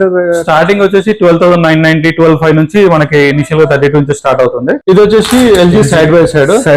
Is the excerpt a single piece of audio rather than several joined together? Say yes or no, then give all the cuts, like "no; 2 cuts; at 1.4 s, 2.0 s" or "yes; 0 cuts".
no; 1 cut; at 4.7 s